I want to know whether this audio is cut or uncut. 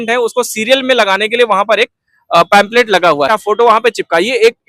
cut